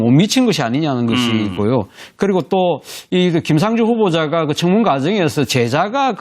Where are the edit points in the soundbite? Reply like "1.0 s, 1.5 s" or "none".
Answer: 3.5 s